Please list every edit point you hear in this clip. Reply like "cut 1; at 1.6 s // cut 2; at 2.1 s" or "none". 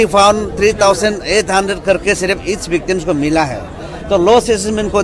none